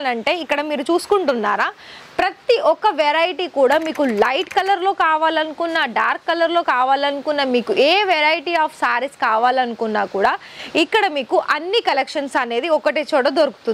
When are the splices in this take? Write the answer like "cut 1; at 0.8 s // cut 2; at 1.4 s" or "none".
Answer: none